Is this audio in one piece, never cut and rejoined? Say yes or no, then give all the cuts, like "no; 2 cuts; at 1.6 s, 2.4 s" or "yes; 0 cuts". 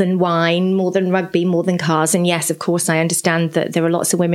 yes; 0 cuts